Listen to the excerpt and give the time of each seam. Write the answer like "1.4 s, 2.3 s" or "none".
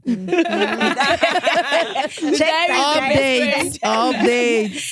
none